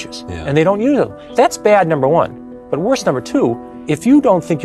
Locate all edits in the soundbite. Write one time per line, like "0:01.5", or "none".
0:01.2
0:03.7